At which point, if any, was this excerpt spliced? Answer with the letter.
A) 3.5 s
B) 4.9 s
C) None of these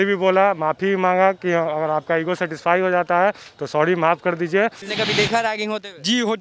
B